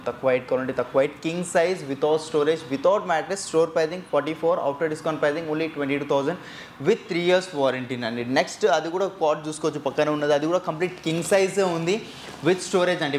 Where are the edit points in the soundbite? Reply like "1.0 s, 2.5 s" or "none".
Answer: none